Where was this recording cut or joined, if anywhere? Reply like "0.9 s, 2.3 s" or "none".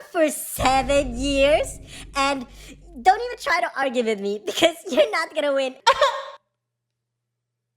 none